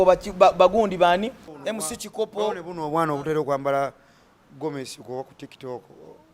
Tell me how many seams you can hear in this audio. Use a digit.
1